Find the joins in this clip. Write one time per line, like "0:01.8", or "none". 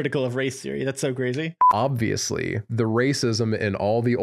0:01.6